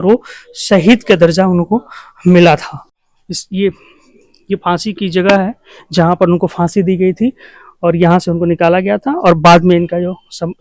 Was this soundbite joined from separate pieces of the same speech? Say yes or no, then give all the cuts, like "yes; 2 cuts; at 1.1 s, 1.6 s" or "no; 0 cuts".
no; 0 cuts